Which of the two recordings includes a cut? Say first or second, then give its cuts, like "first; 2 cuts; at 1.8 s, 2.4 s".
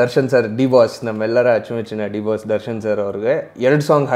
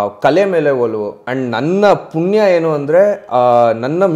second; 1 cut; at 1.3 s